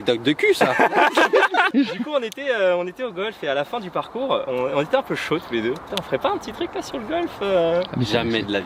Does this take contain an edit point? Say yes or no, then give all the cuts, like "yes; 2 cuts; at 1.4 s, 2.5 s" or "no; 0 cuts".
yes; 2 cuts; at 1.7 s, 5.9 s